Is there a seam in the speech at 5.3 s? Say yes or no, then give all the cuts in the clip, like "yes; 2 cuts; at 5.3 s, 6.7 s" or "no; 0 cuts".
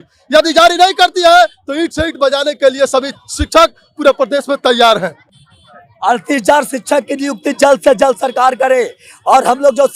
no; 0 cuts